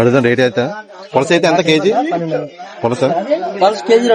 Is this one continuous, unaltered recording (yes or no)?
yes